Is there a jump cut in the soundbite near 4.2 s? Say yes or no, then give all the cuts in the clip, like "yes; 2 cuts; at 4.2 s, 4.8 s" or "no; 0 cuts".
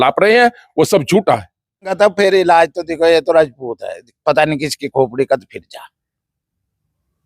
no; 1 cut; at 1.9 s